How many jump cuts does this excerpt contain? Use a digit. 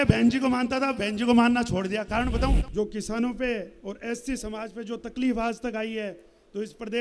1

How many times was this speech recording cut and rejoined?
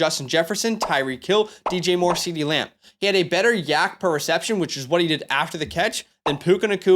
1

